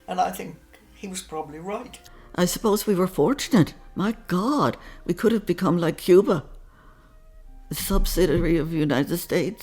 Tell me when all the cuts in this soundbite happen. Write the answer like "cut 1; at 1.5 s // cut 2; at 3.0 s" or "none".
cut 1; at 2.0 s